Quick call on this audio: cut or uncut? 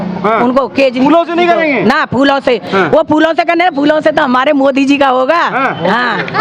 uncut